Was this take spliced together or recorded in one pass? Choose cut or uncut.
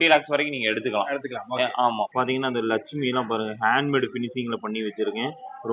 cut